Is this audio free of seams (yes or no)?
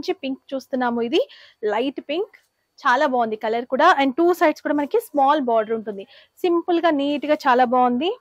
yes